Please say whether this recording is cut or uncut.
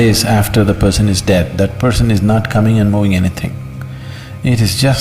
uncut